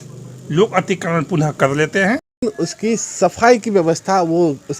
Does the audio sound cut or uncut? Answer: cut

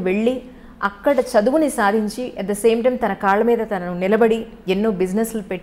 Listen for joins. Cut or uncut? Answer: uncut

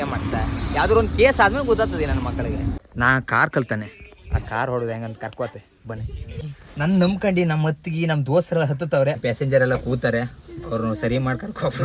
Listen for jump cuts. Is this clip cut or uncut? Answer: cut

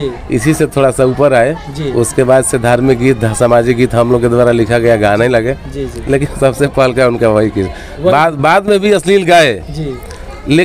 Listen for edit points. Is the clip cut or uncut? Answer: uncut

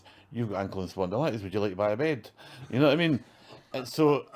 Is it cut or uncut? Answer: uncut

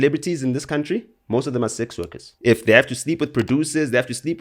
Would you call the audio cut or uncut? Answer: cut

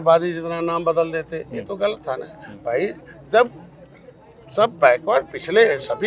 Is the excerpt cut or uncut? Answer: uncut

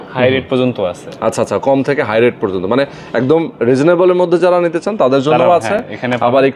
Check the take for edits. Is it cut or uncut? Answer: uncut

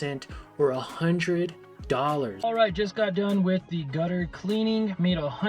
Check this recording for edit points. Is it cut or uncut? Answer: cut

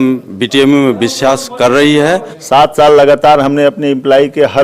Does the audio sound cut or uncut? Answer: cut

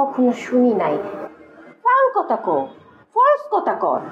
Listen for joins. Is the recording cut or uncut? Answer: cut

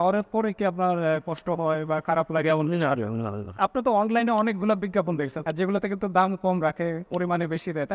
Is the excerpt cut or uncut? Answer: cut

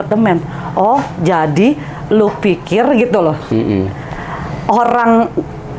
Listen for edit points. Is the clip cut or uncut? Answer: uncut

